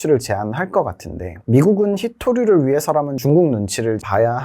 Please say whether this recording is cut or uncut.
cut